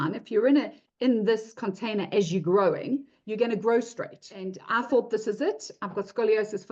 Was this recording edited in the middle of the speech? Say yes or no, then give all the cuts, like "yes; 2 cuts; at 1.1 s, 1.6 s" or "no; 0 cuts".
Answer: yes; 1 cut; at 4.6 s